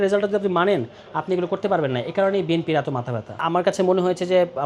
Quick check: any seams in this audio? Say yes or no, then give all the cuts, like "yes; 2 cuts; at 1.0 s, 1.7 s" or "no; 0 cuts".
yes; 1 cut; at 3.4 s